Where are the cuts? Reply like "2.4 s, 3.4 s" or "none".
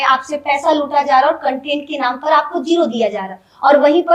none